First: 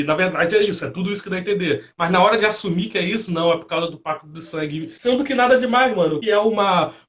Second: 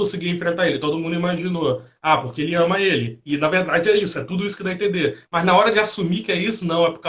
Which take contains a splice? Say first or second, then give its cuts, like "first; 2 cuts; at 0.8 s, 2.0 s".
first; 2 cuts; at 4.9 s, 6.2 s